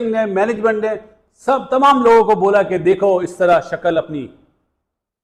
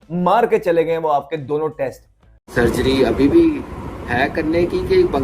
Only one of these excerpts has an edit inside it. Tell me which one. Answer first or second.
second